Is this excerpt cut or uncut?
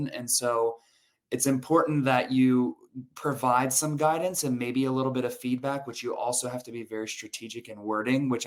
uncut